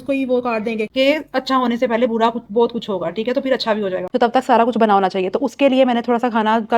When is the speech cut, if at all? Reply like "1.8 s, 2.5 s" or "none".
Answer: 0.9 s, 4.1 s

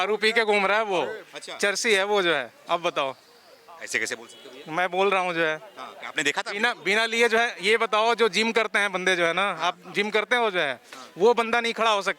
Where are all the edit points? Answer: none

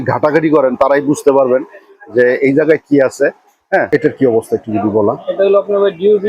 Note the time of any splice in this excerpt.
3.9 s

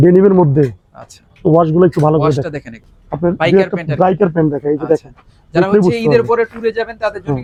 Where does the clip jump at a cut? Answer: none

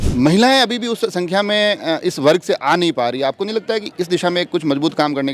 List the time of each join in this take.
none

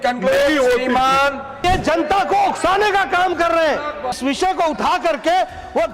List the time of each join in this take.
1.6 s, 4.2 s

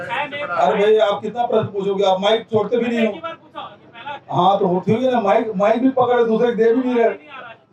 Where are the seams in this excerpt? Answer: none

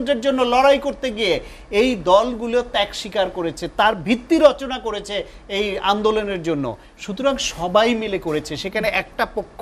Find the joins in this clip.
none

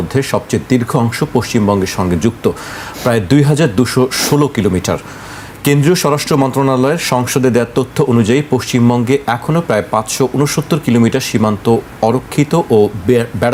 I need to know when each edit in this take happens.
none

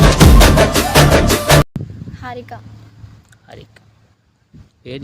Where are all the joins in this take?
1.7 s

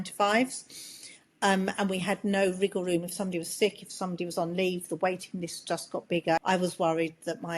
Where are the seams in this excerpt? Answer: 6.4 s

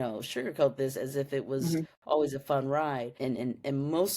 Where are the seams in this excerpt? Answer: 3.1 s

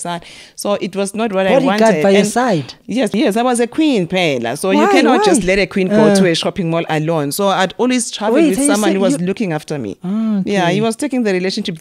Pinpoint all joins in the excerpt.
3.1 s

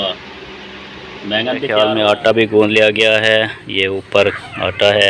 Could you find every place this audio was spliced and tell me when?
1.7 s

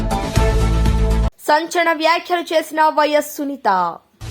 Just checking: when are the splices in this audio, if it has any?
none

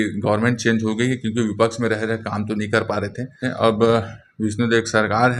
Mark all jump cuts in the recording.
3.4 s

